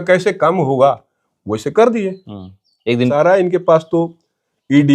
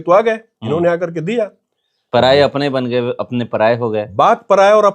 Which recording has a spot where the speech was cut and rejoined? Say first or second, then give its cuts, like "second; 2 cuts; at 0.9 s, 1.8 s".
first; 1 cut; at 3.1 s